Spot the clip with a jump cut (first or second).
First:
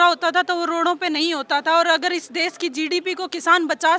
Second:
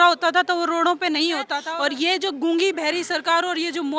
second